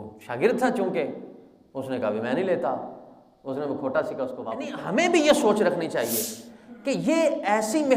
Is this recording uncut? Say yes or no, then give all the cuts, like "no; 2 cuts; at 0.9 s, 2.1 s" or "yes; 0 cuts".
no; 1 cut; at 4.7 s